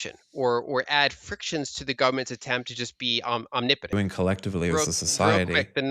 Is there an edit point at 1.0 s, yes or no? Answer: no